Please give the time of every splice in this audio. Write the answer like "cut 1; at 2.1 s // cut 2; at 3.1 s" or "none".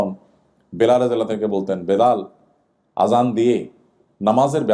none